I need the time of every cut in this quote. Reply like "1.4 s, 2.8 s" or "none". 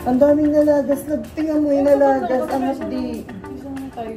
none